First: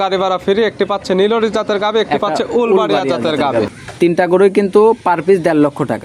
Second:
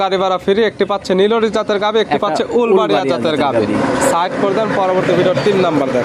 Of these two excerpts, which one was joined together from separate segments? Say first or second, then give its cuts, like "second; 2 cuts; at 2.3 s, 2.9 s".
first; 1 cut; at 3.7 s